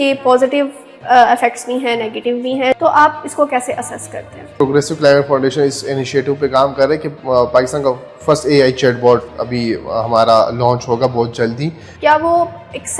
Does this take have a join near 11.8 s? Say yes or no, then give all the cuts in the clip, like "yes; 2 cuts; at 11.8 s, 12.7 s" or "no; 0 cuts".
yes; 3 cuts; at 2.7 s, 4.5 s, 11.8 s